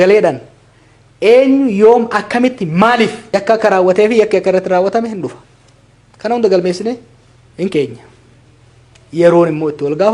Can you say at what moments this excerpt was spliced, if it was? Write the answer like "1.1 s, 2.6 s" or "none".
3.2 s